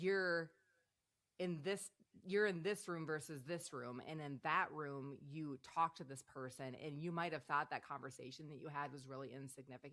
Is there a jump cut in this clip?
no; 0 cuts

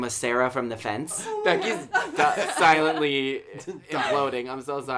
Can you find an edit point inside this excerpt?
yes; 1 cut; at 1.2 s

